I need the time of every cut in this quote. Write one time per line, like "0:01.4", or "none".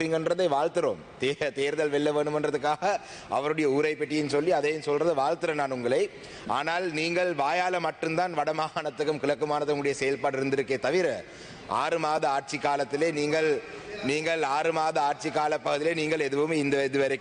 none

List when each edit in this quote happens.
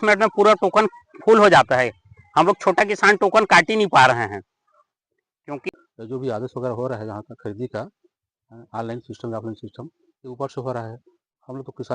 0:05.7

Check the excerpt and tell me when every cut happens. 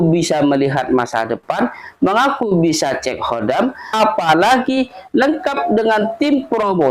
0:03.8

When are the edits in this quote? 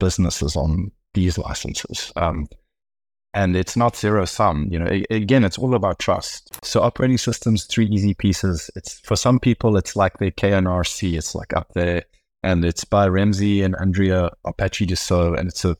0:06.6

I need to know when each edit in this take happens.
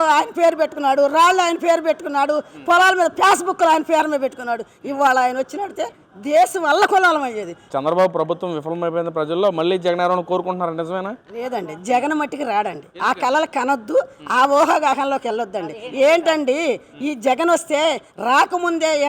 0:07.6

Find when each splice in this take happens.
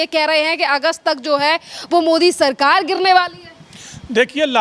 none

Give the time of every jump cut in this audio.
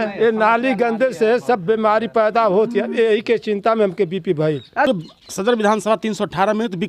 0:04.9

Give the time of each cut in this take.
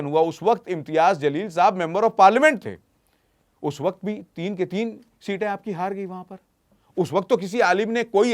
none

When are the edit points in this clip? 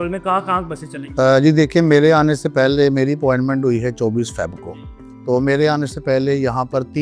none

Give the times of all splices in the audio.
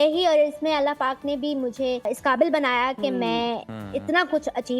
0:02.1

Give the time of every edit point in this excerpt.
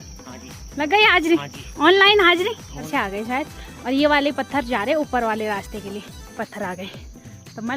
0:02.8
0:06.4

